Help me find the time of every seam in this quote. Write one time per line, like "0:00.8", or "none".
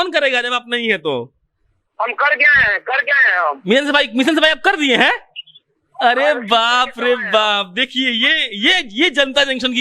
none